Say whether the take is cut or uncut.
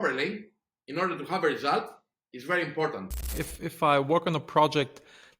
cut